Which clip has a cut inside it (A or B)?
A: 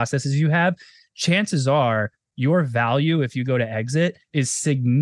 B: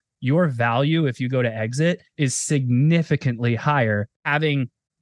B